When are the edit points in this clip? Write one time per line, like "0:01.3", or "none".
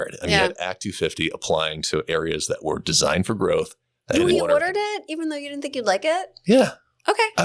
0:04.1